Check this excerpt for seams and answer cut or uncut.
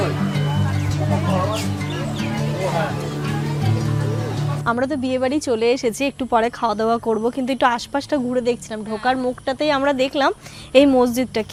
uncut